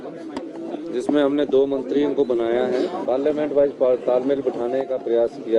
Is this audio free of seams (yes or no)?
no